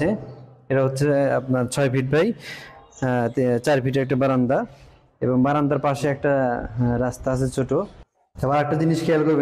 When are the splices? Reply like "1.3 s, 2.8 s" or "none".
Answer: 8.0 s